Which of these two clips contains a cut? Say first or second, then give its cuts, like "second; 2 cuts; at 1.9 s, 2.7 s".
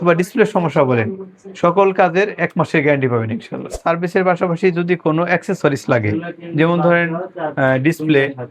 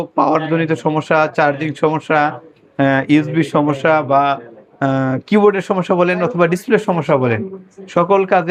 first; 1 cut; at 3.8 s